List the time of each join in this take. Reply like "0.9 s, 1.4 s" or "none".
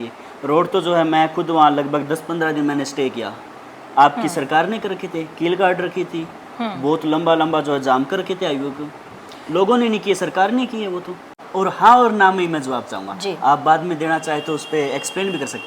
11.3 s